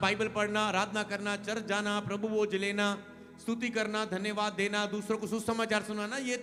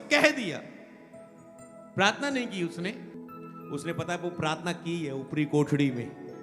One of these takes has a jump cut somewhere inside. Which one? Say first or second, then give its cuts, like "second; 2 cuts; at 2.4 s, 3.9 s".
second; 1 cut; at 3.2 s